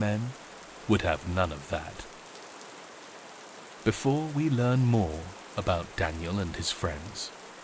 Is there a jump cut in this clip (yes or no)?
no